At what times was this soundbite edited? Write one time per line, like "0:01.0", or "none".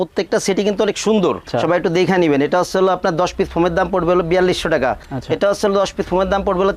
0:01.5
0:05.0

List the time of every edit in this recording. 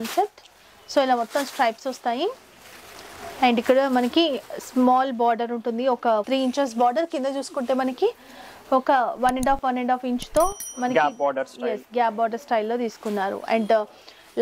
none

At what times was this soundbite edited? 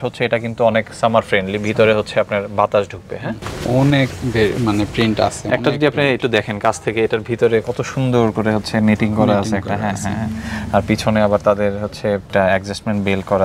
none

